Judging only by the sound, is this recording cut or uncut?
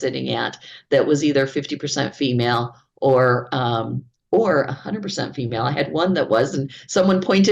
uncut